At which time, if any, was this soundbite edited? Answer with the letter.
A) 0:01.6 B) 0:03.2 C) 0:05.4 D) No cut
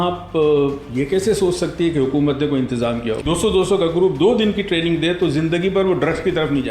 B